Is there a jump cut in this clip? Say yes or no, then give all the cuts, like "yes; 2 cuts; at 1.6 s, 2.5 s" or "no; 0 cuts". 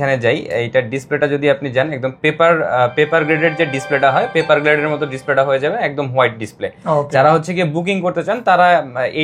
no; 0 cuts